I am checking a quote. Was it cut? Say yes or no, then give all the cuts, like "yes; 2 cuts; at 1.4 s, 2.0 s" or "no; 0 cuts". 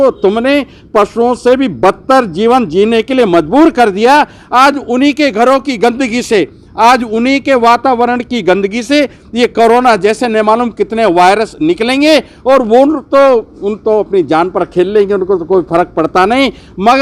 no; 0 cuts